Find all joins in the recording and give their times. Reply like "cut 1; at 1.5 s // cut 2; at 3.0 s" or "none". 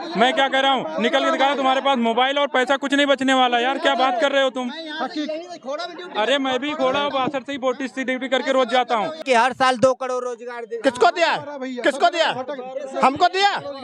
cut 1; at 9.2 s